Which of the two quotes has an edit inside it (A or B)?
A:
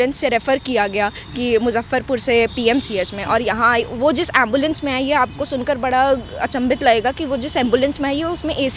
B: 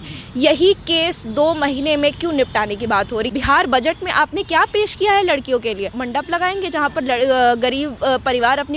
B